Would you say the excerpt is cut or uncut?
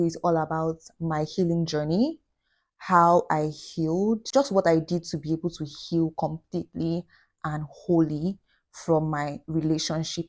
uncut